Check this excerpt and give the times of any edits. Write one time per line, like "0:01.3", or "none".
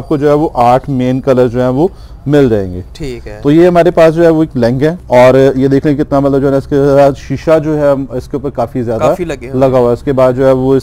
none